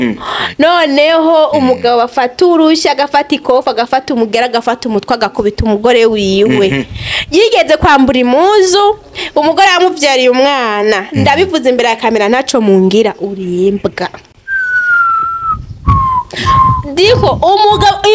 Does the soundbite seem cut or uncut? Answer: uncut